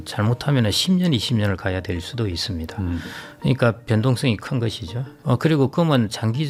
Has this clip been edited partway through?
no; 0 cuts

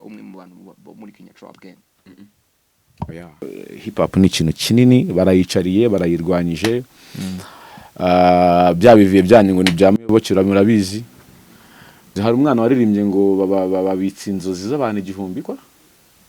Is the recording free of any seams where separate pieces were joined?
no; 2 cuts; at 3.5 s, 12.2 s

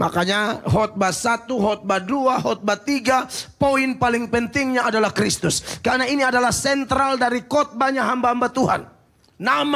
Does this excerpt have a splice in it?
no; 0 cuts

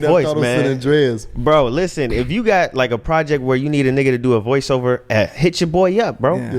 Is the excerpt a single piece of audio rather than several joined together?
yes; 0 cuts

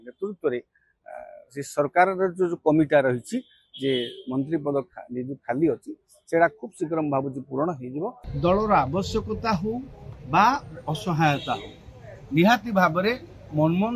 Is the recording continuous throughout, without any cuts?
no; 1 cut; at 8.2 s

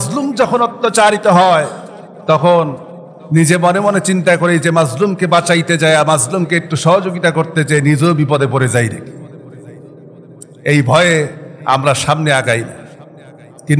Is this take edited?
no; 0 cuts

